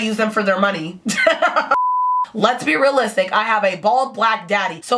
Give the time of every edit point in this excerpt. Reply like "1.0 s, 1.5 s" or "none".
2.1 s